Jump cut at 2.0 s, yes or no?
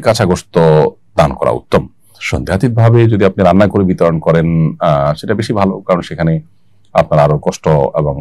no